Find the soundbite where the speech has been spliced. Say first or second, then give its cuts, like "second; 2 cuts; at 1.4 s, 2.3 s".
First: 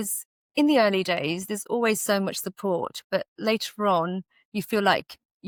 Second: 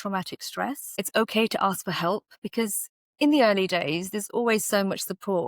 second; 1 cut; at 1.1 s